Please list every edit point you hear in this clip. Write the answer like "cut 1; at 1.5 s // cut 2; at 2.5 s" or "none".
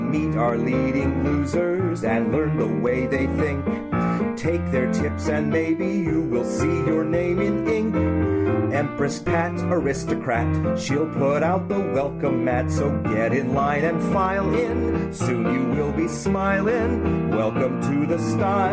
none